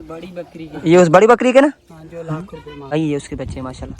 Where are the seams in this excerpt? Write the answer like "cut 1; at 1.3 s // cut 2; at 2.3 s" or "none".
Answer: cut 1; at 3.0 s

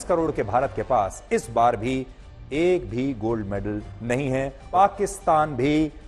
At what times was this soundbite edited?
cut 1; at 4.6 s

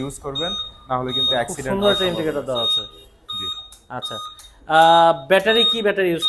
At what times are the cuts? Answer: none

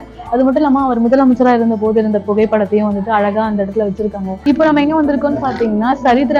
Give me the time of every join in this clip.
cut 1; at 4.3 s

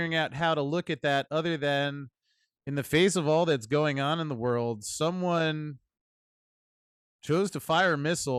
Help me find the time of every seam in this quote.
none

